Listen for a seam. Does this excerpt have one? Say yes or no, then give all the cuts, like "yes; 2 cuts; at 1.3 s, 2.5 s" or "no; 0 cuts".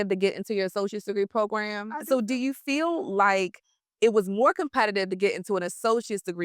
yes; 1 cut; at 2.0 s